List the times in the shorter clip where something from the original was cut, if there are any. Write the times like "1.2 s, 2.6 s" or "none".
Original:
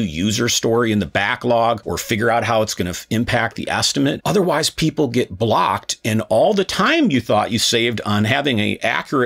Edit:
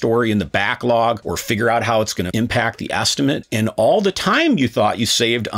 2.3 s, 3.4 s